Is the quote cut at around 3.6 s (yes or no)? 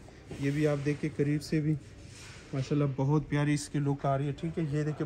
no